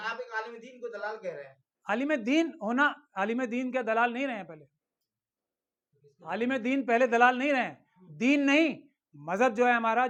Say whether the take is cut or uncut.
uncut